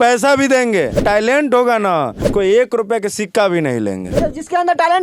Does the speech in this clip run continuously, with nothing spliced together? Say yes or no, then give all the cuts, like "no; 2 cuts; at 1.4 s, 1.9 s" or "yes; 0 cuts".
no; 2 cuts; at 1.0 s, 2.2 s